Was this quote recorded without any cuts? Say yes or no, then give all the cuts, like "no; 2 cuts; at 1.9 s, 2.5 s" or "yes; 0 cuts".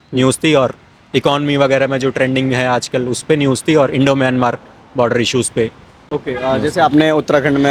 yes; 0 cuts